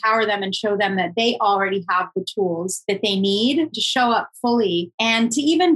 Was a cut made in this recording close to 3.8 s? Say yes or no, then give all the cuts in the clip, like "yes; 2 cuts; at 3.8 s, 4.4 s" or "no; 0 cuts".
yes; 3 cuts; at 2.7 s, 3.8 s, 4.9 s